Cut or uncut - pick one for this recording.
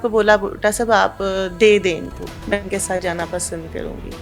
cut